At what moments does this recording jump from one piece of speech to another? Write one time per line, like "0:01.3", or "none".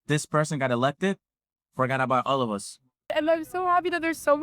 0:03.1